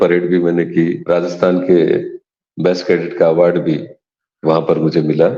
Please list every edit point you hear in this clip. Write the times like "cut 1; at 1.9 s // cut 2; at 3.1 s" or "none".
cut 1; at 1.0 s